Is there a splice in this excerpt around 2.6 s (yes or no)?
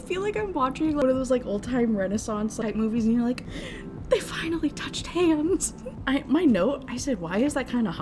yes